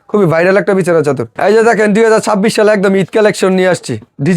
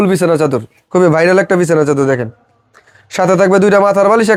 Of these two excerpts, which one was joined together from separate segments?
first; 1 cut; at 1.3 s

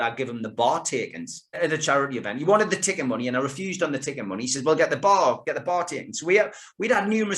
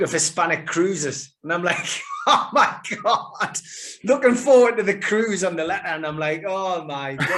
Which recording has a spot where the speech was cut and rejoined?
first; 1 cut; at 1.6 s

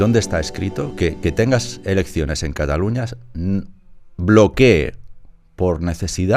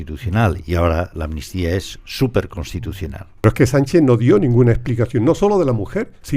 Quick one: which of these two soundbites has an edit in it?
second; 1 cut; at 3.4 s

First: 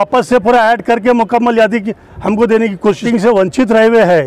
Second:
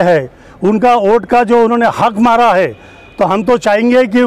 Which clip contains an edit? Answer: first; 1 cut; at 3.0 s

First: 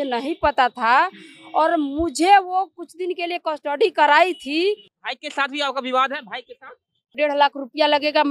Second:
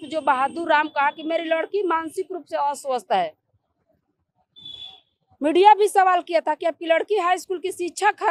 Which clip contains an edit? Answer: first; 2 cuts; at 4.9 s, 7.1 s

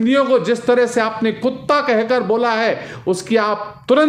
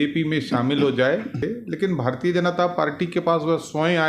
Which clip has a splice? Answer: second; 1 cut; at 1.4 s

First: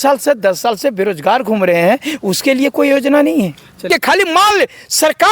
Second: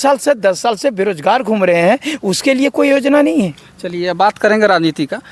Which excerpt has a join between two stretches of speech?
first; 1 cut; at 3.9 s

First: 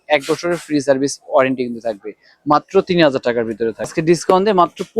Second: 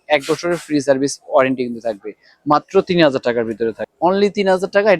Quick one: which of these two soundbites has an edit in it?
first; 1 cut; at 3.9 s

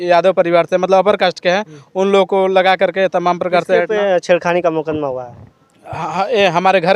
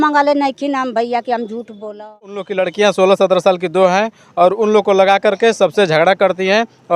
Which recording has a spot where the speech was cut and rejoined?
second; 1 cut; at 2.5 s

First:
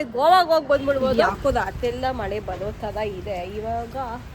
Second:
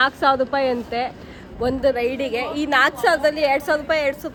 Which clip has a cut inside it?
first; 1 cut; at 1.3 s

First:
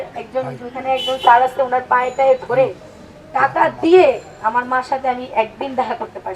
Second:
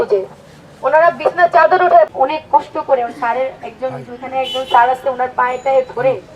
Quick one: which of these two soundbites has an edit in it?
second; 1 cut; at 2.1 s

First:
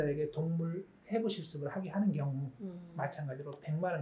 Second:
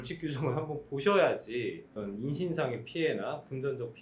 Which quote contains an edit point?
second; 1 cut; at 1.9 s

